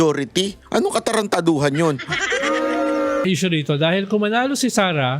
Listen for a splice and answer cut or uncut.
cut